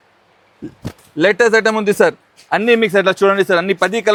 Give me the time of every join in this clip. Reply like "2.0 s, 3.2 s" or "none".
none